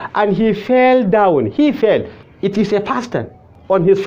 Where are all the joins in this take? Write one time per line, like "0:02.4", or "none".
0:02.2